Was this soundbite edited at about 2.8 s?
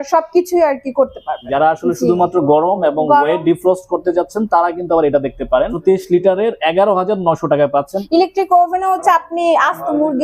no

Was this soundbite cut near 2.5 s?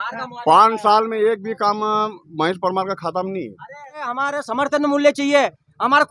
no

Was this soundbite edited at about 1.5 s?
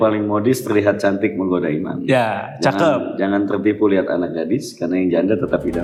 no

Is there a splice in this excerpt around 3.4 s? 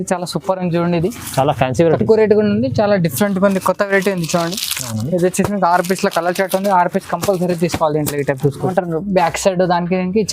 no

